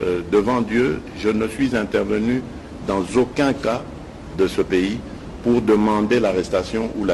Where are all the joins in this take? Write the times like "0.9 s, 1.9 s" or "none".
none